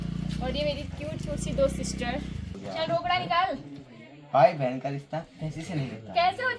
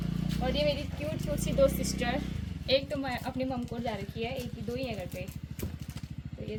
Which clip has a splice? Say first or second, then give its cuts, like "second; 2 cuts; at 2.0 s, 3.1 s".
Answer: first; 1 cut; at 2.6 s